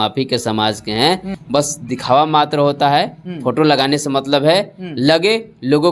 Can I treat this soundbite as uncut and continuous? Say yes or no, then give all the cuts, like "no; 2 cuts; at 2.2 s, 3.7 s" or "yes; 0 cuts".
no; 1 cut; at 1.3 s